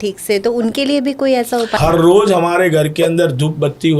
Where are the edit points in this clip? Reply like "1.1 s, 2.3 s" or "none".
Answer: 1.7 s